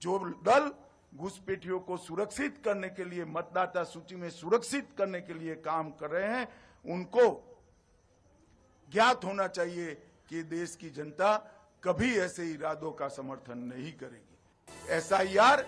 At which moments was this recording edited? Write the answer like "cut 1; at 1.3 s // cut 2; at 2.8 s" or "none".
cut 1; at 14.6 s